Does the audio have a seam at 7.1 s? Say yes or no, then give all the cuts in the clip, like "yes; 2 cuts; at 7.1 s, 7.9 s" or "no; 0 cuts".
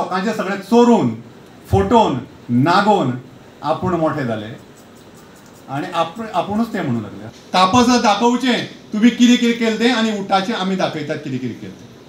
yes; 1 cut; at 7.1 s